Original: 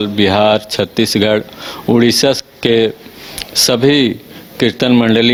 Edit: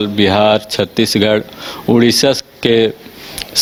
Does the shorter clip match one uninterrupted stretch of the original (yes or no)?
yes